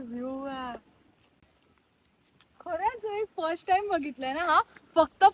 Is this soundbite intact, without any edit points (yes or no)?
yes